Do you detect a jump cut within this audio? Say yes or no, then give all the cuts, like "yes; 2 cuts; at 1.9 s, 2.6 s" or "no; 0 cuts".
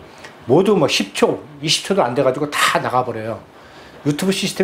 no; 0 cuts